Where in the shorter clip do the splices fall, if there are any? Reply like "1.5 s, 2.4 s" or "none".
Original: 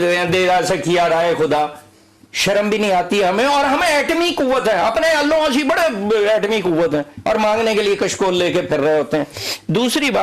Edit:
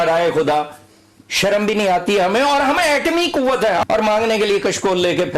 3.8 s